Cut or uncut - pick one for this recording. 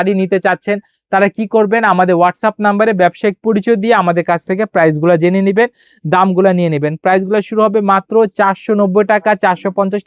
uncut